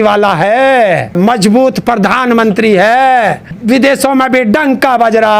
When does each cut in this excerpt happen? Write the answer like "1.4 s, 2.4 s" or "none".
1.2 s, 3.5 s